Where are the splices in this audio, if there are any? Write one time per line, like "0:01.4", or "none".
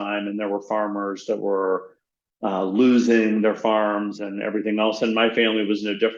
none